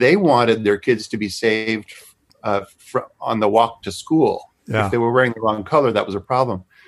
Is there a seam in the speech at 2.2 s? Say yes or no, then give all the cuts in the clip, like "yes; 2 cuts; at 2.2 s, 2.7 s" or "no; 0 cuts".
no; 0 cuts